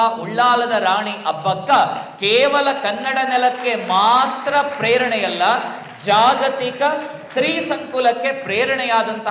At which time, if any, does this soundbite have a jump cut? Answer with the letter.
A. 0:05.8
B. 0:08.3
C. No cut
C